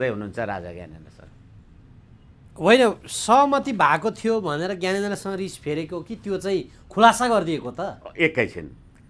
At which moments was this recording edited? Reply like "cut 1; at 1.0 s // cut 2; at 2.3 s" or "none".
none

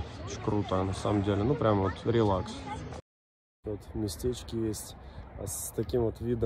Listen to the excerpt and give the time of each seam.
cut 1; at 3.6 s

